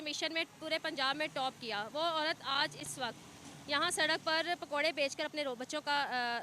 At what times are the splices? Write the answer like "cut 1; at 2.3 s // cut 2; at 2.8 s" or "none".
none